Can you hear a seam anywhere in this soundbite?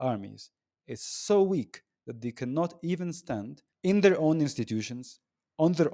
yes; 1 cut; at 3.6 s

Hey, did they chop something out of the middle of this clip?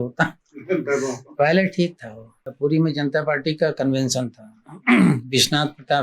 yes; 1 cut; at 2.5 s

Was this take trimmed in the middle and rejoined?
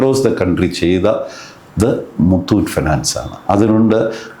no; 0 cuts

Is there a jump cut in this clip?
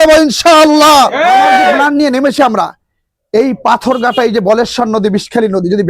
yes; 1 cut; at 1.8 s

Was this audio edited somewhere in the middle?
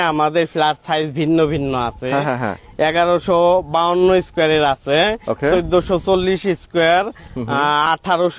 no; 0 cuts

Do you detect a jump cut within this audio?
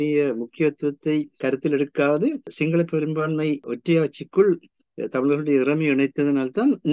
yes; 3 cuts; at 1.4 s, 2.5 s, 3.7 s

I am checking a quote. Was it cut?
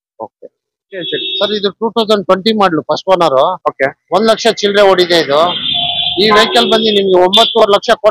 yes; 1 cut; at 1.1 s

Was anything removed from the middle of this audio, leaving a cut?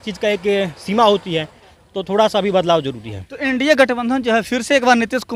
no; 0 cuts

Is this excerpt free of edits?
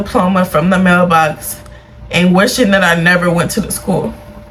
yes; 0 cuts

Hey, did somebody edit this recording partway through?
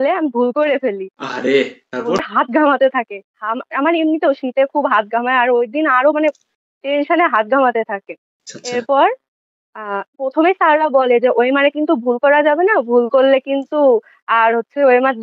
yes; 1 cut; at 2.2 s

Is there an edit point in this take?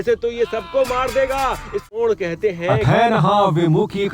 yes; 1 cut; at 1.9 s

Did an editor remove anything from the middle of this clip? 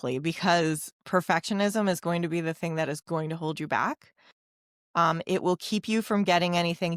no; 0 cuts

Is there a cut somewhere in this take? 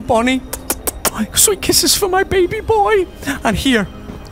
no; 0 cuts

